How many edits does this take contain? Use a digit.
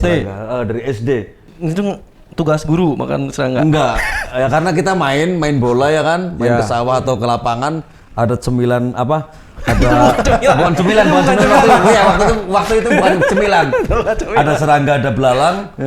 0